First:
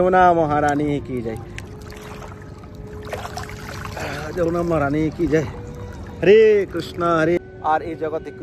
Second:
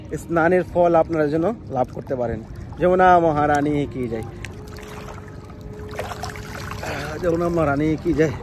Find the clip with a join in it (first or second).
first